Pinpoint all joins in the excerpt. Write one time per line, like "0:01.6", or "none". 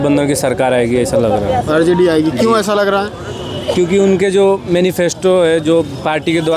none

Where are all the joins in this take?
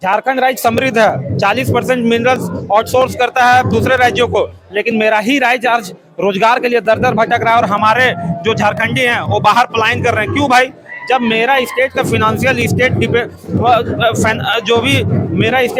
none

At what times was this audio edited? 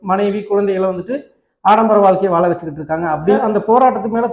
0:03.4

